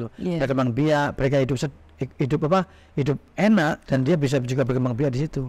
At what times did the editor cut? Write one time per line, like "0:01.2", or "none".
none

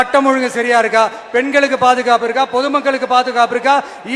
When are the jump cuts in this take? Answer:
none

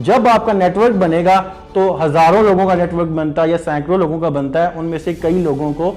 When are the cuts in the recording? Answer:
none

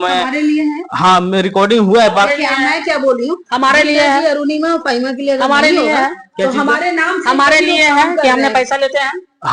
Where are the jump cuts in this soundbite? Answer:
none

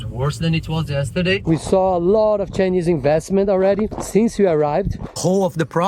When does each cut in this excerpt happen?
0:01.4
0:05.1

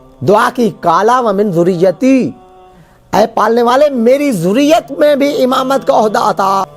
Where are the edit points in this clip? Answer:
none

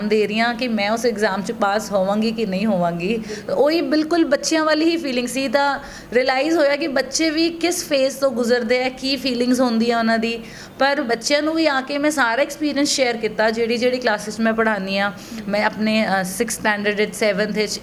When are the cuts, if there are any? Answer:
none

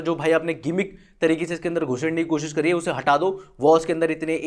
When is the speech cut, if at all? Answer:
none

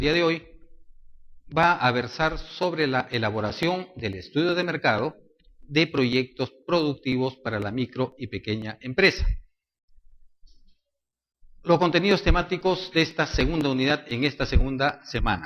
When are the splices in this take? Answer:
none

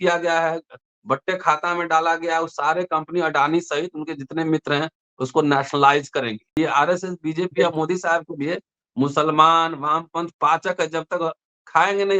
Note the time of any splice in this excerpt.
0:06.6

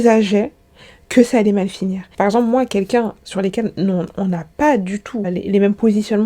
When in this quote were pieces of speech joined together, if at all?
0:02.0

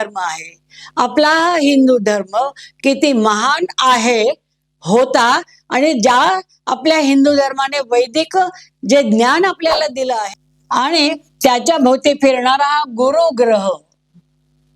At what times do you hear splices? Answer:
0:10.3

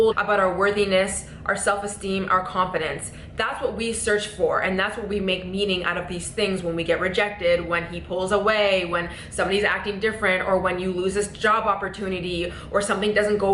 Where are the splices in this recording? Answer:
none

